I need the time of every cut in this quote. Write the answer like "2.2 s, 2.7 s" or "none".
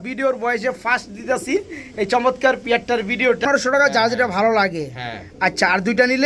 3.4 s